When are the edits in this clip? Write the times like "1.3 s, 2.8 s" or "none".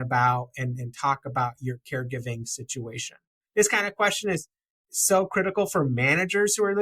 3.3 s

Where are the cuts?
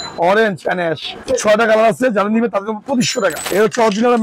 1.2 s, 3.4 s

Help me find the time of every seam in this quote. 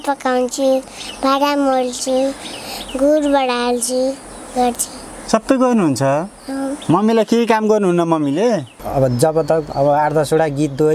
8.8 s

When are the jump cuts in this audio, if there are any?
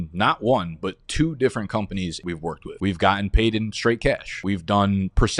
none

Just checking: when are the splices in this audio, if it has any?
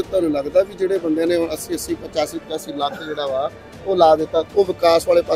4.5 s

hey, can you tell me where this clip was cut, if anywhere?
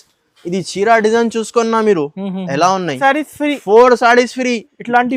3.0 s

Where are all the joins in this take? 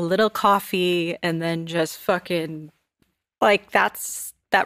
3.0 s

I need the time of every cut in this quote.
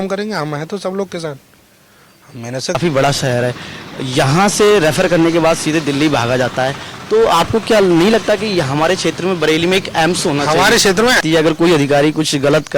2.8 s, 11.2 s

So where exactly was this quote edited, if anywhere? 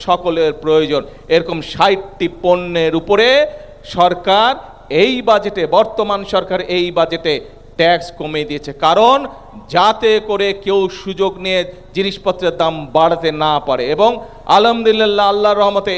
none

